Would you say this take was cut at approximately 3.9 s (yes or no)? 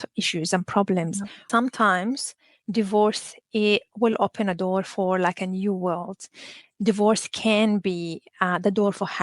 no